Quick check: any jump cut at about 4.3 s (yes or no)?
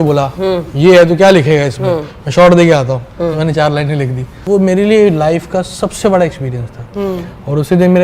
yes